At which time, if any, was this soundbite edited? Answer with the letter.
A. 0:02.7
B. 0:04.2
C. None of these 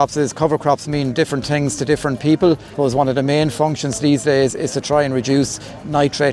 A